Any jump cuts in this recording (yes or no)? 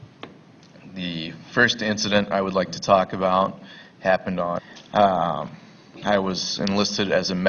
no